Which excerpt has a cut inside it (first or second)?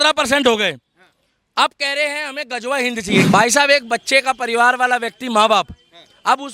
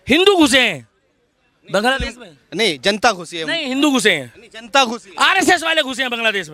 first